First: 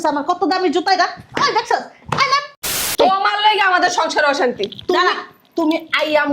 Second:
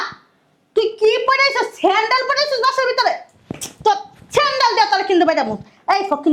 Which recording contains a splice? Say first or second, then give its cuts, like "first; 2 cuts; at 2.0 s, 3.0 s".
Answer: first; 1 cut; at 2.7 s